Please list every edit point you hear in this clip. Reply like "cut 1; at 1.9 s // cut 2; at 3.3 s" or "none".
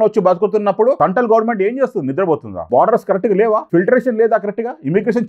cut 1; at 1.0 s // cut 2; at 2.5 s // cut 3; at 3.6 s